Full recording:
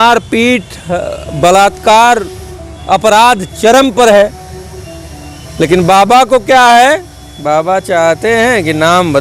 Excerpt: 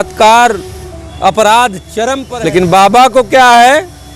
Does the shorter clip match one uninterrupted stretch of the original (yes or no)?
no